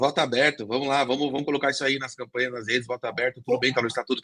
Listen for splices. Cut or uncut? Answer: uncut